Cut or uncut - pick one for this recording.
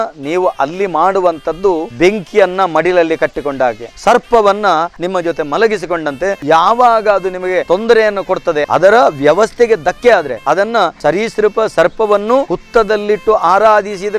cut